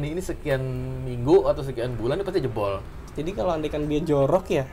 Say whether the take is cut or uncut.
cut